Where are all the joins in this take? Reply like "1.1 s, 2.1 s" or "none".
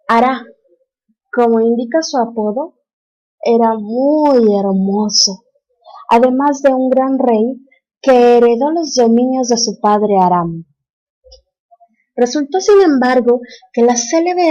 10.1 s